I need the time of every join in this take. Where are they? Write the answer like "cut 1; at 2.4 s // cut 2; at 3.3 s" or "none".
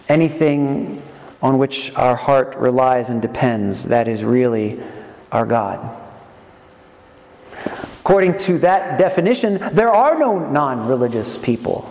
none

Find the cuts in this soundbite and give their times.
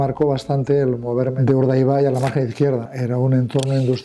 cut 1; at 1.3 s // cut 2; at 2.9 s

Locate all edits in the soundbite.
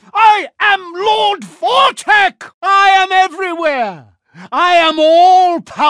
cut 1; at 2.5 s

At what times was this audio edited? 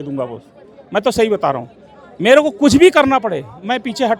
none

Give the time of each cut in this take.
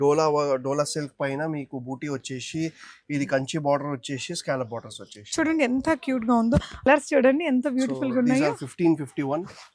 cut 1; at 6.9 s

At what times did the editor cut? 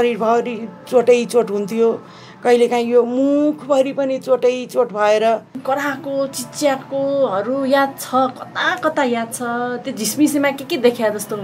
cut 1; at 5.6 s

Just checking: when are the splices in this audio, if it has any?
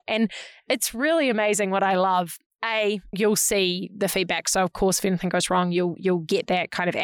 none

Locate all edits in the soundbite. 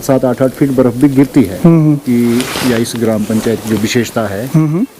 cut 1; at 2.0 s

